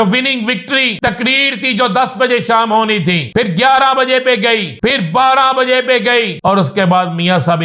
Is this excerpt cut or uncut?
cut